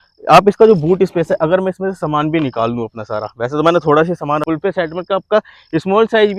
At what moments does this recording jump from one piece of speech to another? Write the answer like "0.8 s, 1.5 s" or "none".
4.4 s